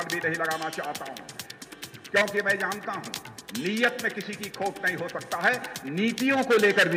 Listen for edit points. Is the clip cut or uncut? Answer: uncut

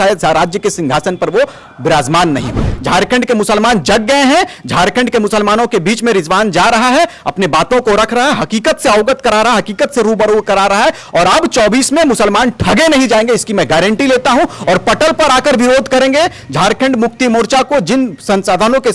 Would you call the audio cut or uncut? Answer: cut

